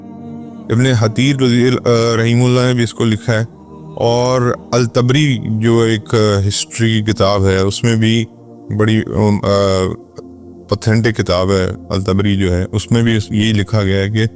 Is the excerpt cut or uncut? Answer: uncut